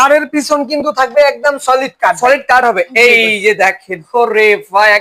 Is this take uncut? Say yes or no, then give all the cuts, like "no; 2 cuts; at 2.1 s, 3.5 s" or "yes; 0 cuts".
yes; 0 cuts